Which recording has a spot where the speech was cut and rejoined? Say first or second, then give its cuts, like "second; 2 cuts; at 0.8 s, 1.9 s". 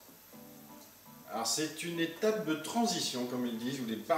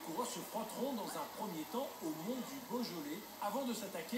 second; 1 cut; at 1.0 s